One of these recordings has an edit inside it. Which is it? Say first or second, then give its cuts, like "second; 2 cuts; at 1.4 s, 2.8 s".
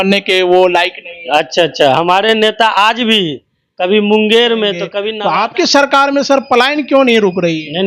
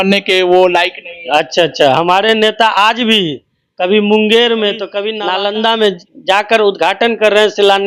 first; 1 cut; at 5.2 s